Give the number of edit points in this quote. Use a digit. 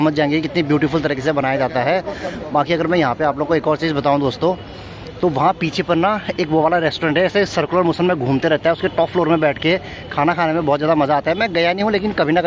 0